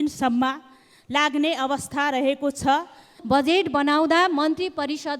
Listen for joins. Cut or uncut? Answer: cut